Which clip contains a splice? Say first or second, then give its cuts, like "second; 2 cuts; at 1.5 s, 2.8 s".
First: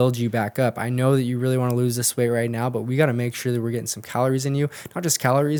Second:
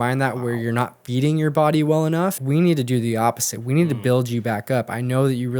second; 1 cut; at 2.4 s